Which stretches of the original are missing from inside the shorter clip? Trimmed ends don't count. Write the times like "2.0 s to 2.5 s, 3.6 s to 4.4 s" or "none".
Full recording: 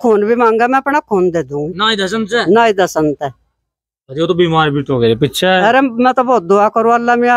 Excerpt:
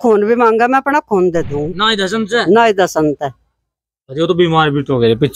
none